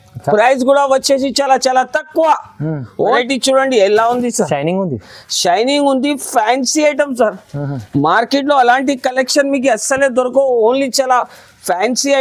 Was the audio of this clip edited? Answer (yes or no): yes